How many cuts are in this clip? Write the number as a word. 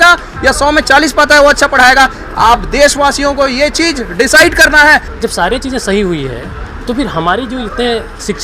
one